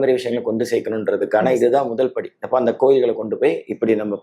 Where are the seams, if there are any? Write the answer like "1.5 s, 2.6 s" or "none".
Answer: none